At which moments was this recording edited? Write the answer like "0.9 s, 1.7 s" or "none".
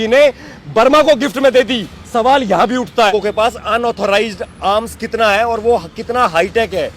3.1 s